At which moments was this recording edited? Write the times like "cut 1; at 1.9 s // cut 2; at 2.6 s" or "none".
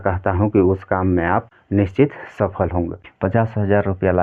cut 1; at 1.6 s // cut 2; at 3.0 s

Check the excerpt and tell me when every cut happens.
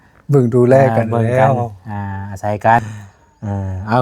cut 1; at 2.8 s

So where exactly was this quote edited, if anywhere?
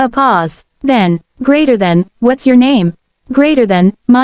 cut 1; at 0.9 s

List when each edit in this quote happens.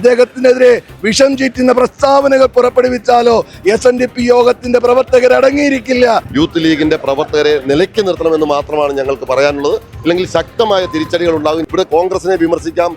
cut 1; at 6.3 s // cut 2; at 11.6 s

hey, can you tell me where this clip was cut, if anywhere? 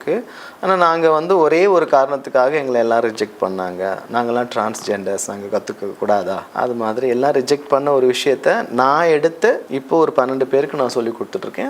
cut 1; at 6.5 s // cut 2; at 9.7 s

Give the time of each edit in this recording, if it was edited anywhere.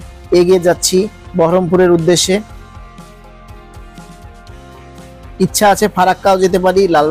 none

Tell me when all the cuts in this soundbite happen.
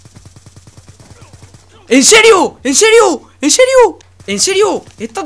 cut 1; at 4.1 s

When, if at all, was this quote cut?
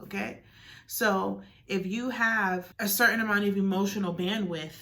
cut 1; at 2.7 s

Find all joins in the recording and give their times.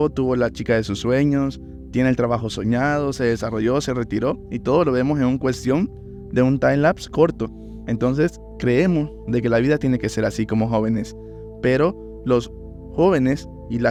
none

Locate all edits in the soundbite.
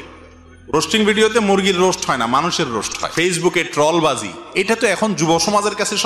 cut 1; at 3.0 s

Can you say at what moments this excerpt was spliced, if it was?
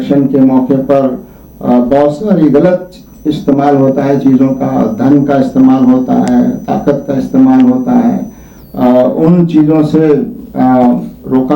none

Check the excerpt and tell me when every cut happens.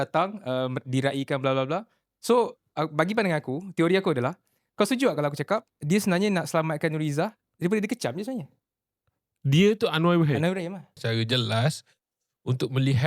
cut 1; at 11.0 s

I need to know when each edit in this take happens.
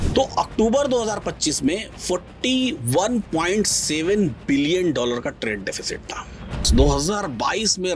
cut 1; at 6.6 s

